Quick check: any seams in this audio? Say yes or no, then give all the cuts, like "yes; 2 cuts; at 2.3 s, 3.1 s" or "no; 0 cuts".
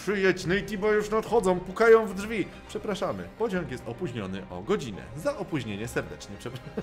no; 0 cuts